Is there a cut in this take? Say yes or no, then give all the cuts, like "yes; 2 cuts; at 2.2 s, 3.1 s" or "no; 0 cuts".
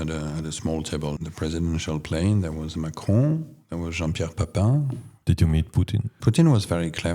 yes; 1 cut; at 5.0 s